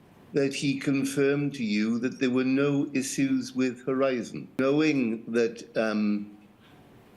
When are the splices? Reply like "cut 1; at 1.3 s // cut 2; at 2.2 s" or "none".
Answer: cut 1; at 4.6 s